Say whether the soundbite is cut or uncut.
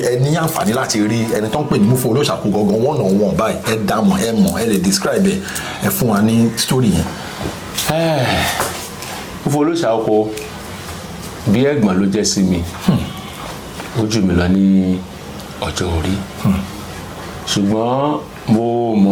uncut